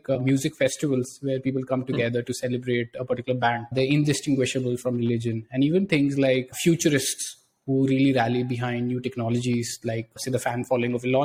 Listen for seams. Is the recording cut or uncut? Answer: uncut